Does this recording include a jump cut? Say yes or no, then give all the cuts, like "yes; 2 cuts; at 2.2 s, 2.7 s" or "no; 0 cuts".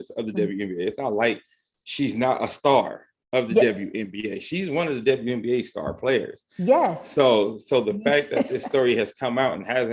no; 0 cuts